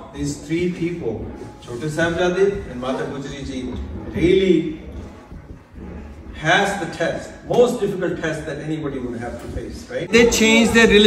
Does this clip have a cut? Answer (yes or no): yes